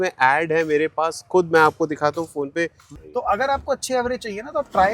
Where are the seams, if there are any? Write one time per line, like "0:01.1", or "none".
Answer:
0:02.9